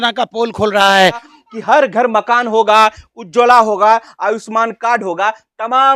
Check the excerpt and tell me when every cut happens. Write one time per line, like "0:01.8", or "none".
0:01.3